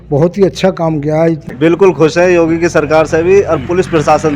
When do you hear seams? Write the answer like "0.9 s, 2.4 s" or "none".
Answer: 1.8 s